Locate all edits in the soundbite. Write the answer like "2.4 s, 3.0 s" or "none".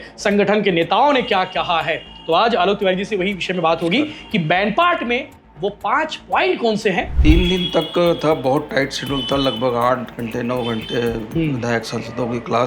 7.1 s